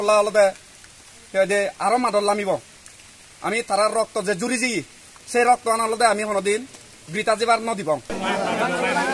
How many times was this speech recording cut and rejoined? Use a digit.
0